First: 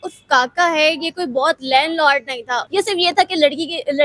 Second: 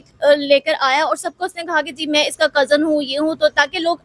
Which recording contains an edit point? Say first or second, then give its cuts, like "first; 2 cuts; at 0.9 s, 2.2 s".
first; 1 cut; at 2.6 s